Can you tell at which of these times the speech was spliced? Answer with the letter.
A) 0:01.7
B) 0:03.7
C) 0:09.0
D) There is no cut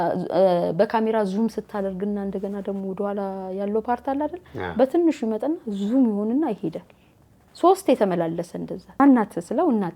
C